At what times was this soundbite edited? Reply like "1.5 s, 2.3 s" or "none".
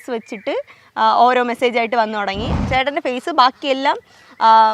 2.5 s